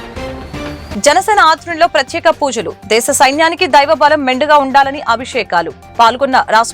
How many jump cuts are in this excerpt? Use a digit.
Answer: 1